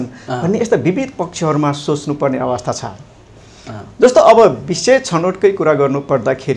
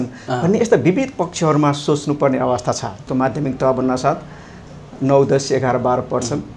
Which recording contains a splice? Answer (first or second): second